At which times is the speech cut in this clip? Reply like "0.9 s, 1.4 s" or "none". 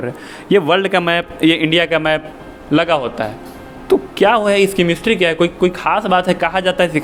none